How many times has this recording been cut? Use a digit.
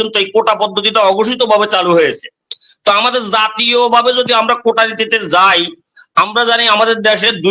0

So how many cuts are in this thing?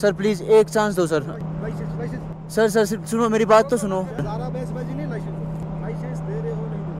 2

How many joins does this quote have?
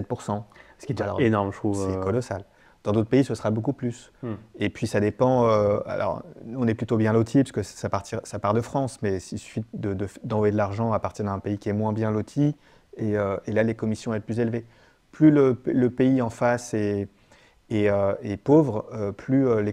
0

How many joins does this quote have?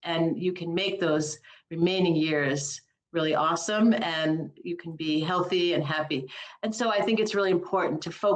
0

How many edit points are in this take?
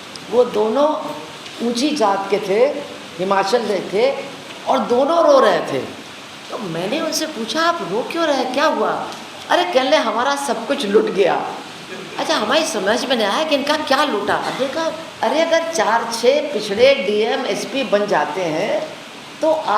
1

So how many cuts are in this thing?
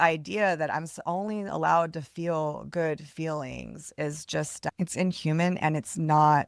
1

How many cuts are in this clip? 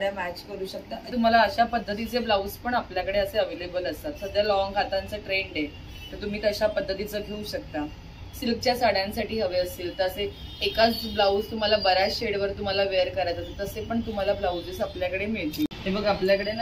2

